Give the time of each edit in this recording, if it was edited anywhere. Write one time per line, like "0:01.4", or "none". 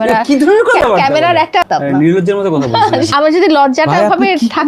0:01.6
0:03.1